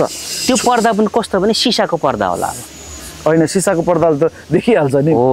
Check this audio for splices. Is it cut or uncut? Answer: uncut